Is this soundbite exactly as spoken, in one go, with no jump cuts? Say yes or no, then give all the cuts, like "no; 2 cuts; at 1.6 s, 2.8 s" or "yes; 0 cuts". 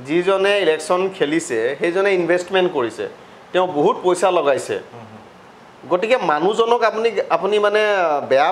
yes; 0 cuts